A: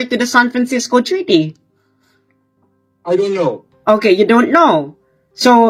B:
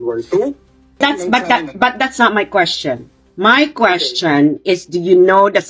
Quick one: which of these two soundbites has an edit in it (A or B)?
B